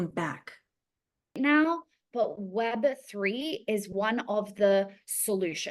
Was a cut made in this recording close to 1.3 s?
yes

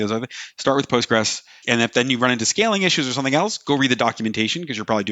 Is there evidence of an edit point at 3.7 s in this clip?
no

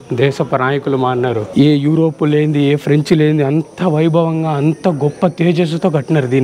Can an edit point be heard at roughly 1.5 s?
yes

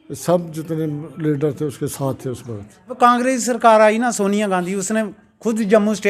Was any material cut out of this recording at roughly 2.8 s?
yes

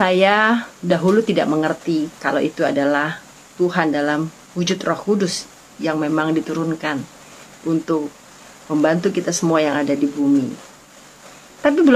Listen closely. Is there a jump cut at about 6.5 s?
no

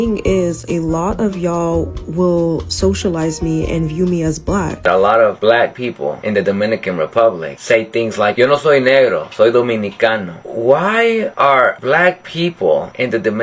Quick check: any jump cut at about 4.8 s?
yes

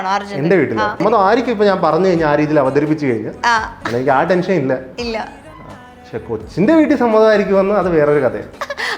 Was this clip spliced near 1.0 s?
yes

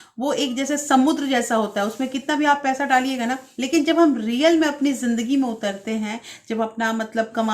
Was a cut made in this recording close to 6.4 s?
no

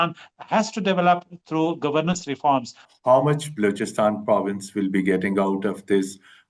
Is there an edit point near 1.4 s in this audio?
no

